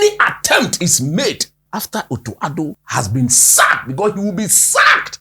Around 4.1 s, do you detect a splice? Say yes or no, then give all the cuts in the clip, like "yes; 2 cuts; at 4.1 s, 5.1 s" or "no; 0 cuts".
no; 2 cuts; at 1.5 s, 2.8 s